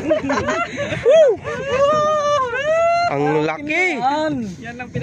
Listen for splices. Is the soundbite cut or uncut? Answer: uncut